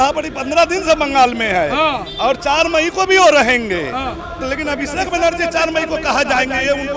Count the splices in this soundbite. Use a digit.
0